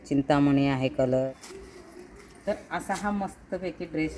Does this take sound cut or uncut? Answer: cut